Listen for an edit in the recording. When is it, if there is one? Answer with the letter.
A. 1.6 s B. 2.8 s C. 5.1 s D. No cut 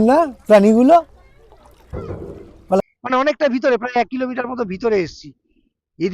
B